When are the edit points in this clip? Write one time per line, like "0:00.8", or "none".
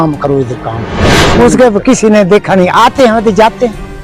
0:01.2